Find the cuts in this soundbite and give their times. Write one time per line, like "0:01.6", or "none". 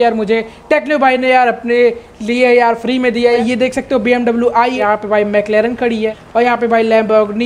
0:03.4
0:04.8
0:06.2